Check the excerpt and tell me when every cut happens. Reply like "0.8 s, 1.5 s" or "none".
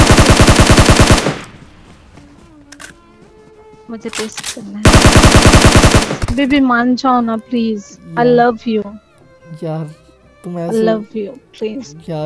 6.2 s